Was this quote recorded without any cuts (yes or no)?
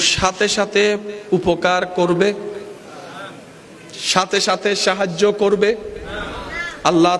yes